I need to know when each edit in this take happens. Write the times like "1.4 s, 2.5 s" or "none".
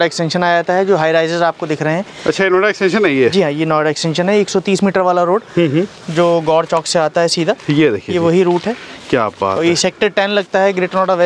none